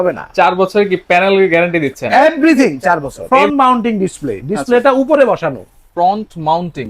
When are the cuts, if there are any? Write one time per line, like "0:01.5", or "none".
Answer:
0:03.1